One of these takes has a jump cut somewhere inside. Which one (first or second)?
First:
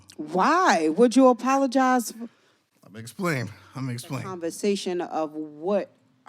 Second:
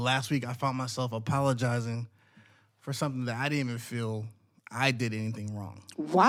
first